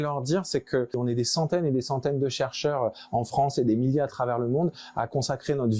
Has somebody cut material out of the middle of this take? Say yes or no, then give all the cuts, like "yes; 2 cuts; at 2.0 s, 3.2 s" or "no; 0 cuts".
yes; 1 cut; at 1.0 s